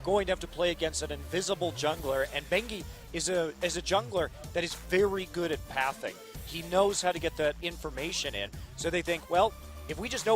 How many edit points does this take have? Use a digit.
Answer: 0